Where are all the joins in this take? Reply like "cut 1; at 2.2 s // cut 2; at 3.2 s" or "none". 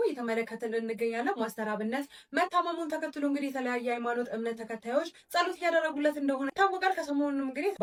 none